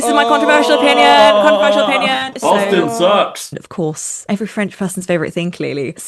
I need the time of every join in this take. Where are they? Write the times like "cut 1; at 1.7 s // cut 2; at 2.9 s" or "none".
cut 1; at 2.3 s // cut 2; at 3.6 s